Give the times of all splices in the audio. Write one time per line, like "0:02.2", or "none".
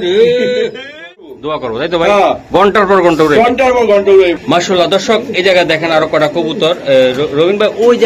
0:01.4